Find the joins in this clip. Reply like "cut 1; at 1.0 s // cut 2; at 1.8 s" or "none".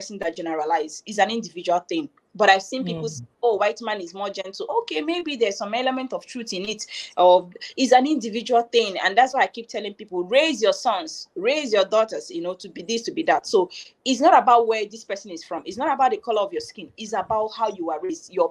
none